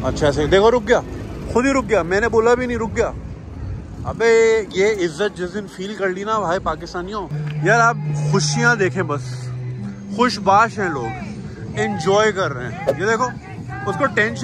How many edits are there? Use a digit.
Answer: 1